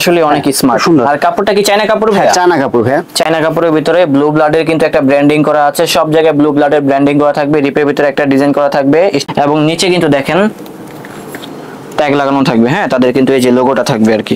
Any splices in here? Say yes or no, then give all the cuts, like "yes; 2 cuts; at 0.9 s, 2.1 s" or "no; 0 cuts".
no; 0 cuts